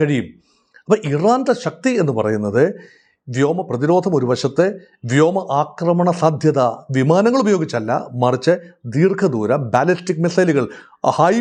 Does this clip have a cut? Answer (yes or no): no